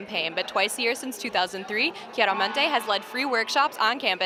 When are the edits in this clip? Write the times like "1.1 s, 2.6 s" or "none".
none